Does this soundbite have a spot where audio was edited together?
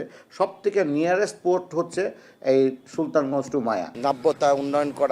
yes; 1 cut; at 3.9 s

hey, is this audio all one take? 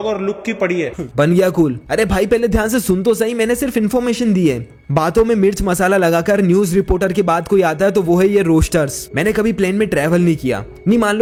yes; 0 cuts

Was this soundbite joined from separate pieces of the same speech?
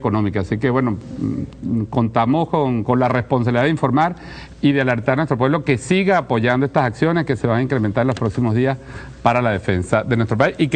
no; 0 cuts

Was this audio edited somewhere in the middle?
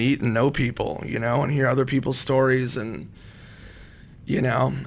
no; 0 cuts

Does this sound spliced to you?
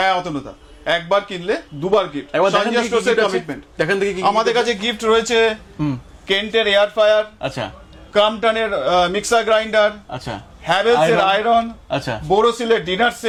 no; 0 cuts

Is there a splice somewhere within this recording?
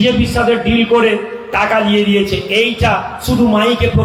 no; 0 cuts

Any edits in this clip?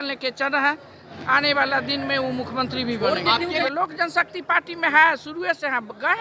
yes; 2 cuts; at 1.1 s, 3.6 s

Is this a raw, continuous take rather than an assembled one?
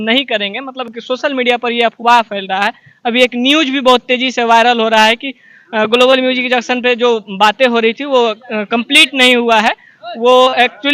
yes; 0 cuts

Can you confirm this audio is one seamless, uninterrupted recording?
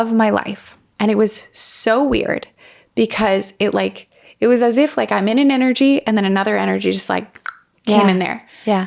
yes; 0 cuts

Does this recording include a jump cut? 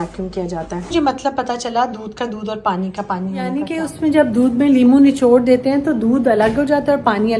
yes; 1 cut; at 0.9 s

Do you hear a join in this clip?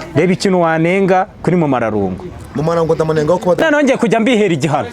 yes; 1 cut; at 3.6 s

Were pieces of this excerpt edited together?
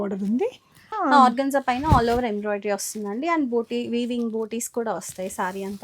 yes; 1 cut; at 0.9 s

